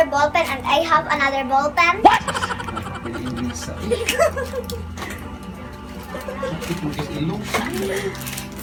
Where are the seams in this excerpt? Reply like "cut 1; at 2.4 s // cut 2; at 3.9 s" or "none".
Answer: none